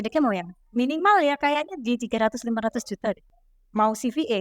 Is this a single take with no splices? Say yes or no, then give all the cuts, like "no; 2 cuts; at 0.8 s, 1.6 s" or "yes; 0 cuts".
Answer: no; 1 cut; at 3.3 s